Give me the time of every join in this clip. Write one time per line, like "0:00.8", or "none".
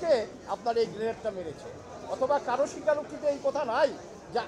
none